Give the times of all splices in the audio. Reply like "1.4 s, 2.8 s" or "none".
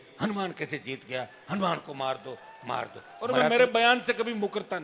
3.5 s